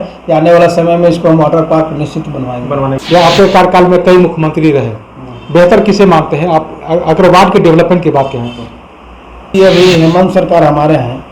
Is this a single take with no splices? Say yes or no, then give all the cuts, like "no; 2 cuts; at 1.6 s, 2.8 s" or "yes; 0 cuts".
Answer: no; 2 cuts; at 3.0 s, 9.5 s